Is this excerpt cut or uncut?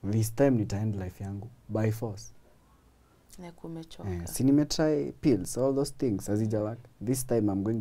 uncut